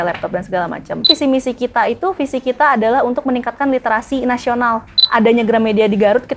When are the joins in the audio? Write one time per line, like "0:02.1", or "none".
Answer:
0:01.1
0:05.0